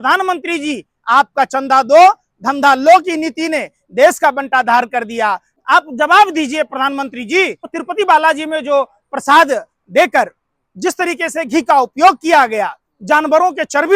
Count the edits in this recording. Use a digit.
2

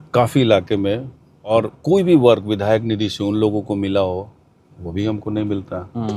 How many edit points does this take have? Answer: 1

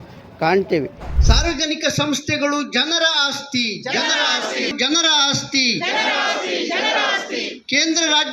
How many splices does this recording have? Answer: 1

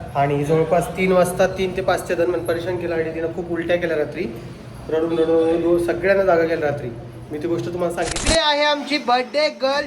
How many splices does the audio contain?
1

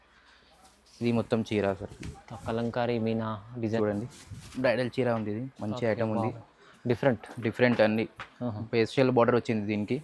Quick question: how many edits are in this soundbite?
1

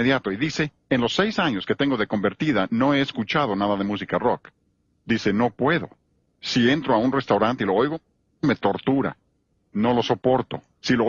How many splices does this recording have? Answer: 1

